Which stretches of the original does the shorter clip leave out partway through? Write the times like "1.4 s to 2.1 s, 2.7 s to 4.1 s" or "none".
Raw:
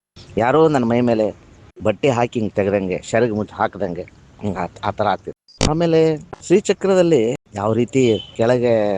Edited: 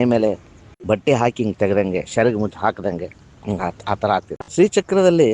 5.3 s to 6.3 s